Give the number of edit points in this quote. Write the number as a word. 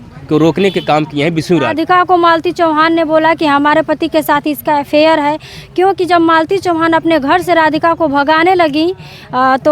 one